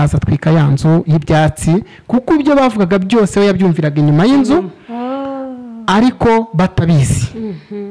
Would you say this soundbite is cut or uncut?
uncut